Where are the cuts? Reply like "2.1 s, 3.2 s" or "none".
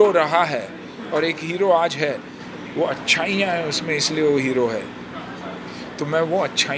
none